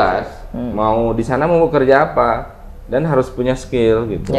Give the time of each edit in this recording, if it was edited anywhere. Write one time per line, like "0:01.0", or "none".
none